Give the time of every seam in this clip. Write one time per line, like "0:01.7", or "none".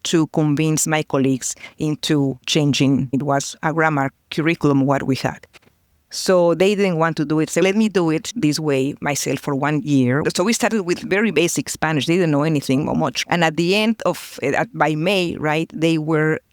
0:00.8
0:03.1
0:10.2

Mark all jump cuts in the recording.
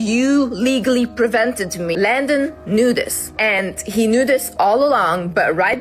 0:01.9
0:03.2

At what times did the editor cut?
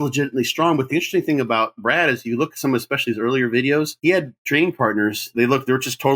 0:03.9
0:05.3

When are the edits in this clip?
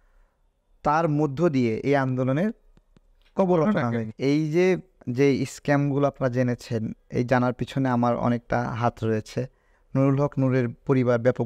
0:04.0
0:09.7

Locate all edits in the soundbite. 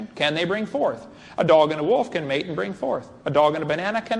0:01.1

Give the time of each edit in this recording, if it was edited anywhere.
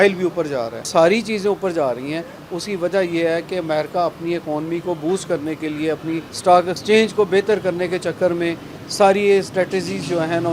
0:00.9
0:06.3

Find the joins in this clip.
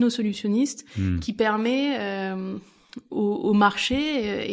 none

